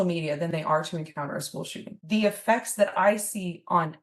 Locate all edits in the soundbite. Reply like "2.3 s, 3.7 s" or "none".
2.0 s